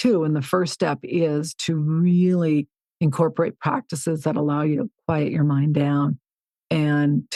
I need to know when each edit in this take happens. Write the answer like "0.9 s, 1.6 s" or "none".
none